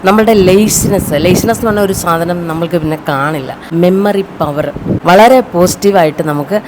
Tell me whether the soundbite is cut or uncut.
cut